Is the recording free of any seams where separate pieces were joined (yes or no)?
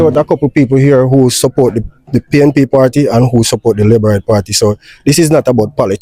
yes